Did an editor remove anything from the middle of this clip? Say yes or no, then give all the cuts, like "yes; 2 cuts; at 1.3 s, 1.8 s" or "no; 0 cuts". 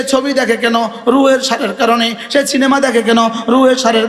no; 0 cuts